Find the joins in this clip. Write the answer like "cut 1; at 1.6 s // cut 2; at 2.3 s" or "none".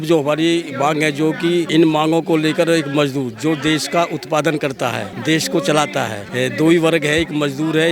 cut 1; at 1.7 s // cut 2; at 5.1 s // cut 3; at 6.2 s